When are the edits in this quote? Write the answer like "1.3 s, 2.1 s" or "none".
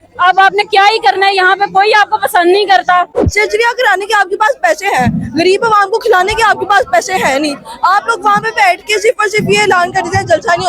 3.2 s